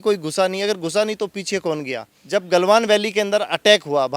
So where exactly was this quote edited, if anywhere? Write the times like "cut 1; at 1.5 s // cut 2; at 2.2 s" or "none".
cut 1; at 2.1 s